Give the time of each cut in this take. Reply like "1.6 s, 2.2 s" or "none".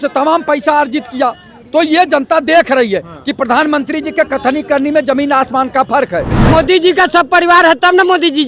6.3 s